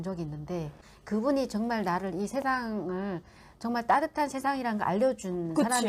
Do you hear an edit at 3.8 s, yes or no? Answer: no